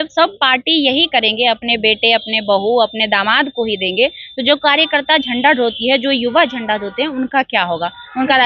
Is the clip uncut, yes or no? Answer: yes